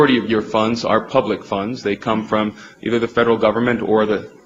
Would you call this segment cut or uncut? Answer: uncut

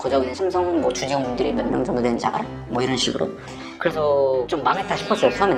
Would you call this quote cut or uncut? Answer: uncut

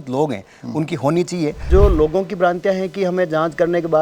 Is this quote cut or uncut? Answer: cut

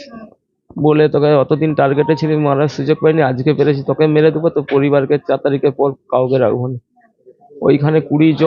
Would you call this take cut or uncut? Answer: uncut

